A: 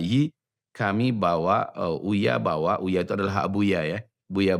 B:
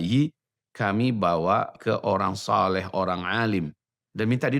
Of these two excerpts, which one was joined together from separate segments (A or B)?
B